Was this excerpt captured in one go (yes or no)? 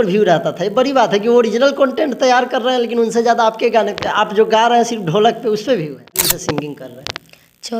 no